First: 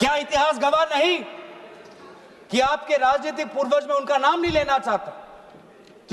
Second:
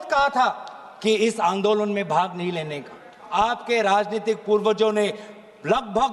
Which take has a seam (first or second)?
second